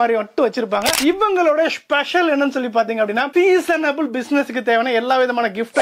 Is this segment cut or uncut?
cut